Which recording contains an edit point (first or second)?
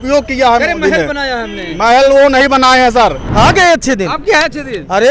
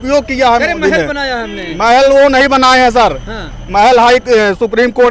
first